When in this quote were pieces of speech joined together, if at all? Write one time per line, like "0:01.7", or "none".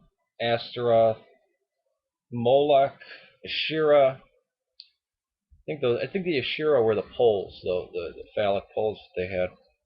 0:05.1